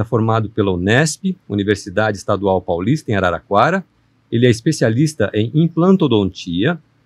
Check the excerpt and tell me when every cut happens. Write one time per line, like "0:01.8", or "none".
none